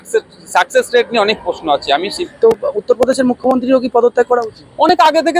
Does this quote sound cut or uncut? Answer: cut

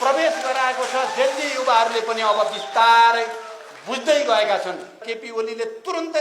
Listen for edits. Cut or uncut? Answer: cut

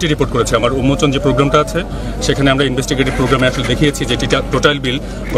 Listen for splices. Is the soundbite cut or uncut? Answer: uncut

